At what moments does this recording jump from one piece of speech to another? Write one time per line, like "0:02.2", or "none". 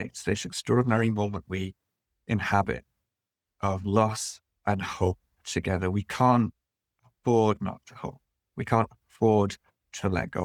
none